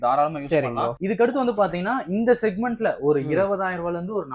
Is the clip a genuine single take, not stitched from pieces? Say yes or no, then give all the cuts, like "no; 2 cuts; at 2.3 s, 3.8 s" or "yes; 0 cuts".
yes; 0 cuts